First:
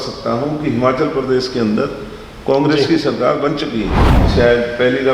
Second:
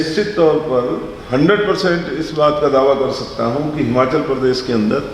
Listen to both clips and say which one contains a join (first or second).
first